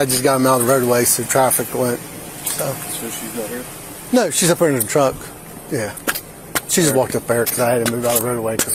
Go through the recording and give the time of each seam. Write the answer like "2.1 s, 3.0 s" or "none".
none